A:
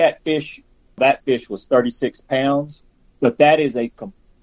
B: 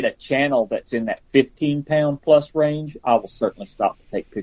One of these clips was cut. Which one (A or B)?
A